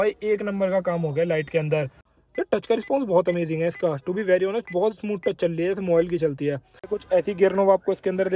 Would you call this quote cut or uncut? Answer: cut